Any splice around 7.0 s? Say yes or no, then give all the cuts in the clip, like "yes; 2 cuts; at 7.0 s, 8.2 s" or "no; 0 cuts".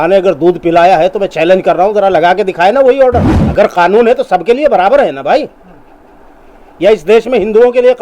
no; 1 cut; at 3.4 s